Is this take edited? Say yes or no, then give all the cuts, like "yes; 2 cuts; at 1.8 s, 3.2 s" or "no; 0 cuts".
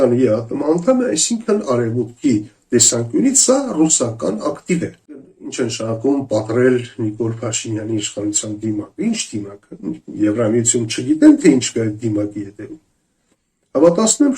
yes; 1 cut; at 5.4 s